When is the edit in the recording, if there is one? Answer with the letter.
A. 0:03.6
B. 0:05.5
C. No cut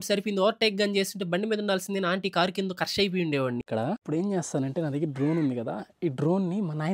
A